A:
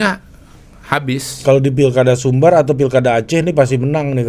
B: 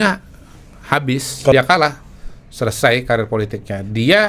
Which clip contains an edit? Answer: B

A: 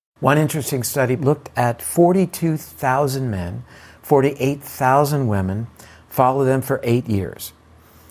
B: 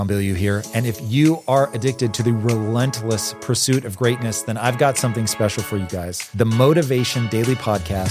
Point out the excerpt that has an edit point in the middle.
A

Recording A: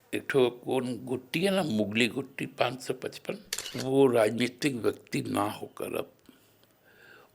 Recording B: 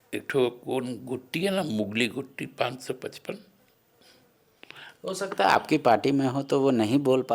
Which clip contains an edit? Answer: A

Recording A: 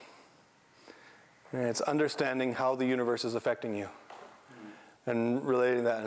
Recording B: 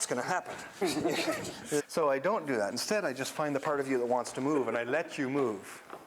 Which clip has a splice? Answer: B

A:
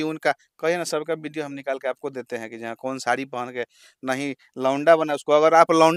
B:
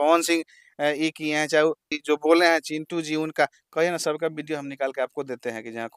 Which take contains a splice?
B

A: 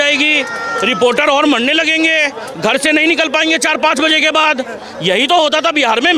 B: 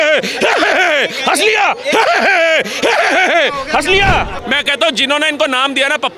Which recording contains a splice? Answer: B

